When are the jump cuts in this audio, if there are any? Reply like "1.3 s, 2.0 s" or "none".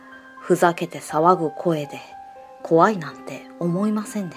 none